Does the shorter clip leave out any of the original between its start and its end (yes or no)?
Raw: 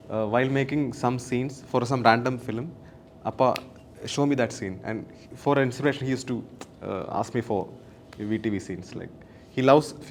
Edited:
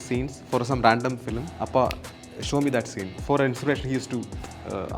yes